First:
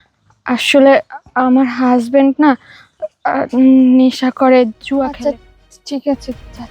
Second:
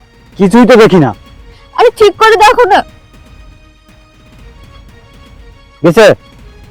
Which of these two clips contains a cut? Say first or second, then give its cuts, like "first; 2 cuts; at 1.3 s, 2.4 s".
first; 1 cut; at 5.1 s